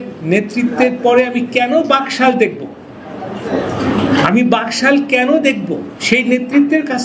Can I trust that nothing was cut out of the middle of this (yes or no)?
yes